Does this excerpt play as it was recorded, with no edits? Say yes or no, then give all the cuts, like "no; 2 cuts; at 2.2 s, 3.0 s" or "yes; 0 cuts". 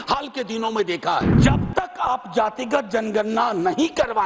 no; 1 cut; at 1.4 s